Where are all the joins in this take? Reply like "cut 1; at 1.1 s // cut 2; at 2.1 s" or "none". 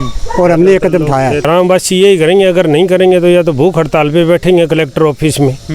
cut 1; at 1.4 s